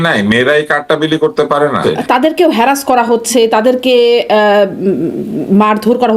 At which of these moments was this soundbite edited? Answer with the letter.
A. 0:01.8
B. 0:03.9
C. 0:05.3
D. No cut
A